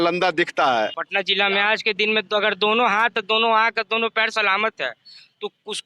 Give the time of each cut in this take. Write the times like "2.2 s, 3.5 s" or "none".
1.0 s